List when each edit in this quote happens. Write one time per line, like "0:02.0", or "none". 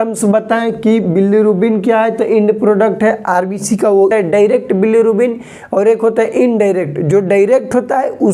0:04.1